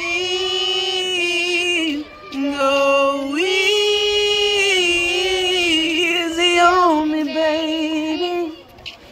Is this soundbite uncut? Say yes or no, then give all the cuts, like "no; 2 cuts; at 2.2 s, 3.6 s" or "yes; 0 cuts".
yes; 0 cuts